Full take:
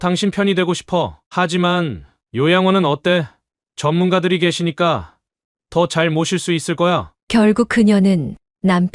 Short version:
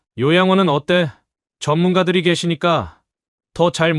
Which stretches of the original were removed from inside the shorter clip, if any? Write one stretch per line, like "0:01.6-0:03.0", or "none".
none